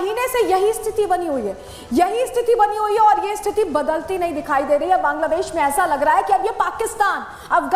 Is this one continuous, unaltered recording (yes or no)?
yes